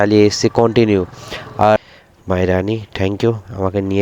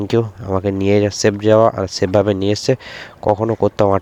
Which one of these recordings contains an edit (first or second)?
first